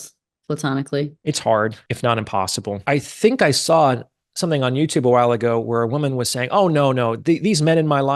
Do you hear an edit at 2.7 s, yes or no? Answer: yes